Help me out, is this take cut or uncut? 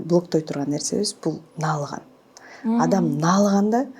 uncut